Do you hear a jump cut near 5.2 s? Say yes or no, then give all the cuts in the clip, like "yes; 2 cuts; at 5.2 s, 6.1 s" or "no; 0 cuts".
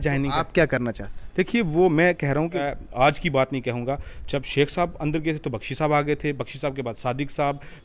no; 1 cut; at 2.6 s